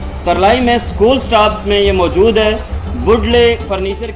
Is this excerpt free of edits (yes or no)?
yes